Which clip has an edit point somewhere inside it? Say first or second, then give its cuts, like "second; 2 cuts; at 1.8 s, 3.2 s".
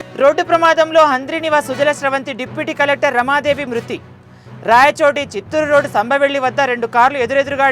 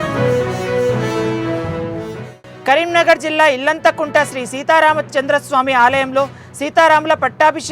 second; 1 cut; at 2.2 s